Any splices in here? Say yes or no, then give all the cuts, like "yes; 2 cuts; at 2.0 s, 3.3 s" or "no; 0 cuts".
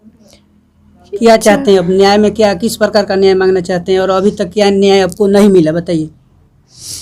no; 0 cuts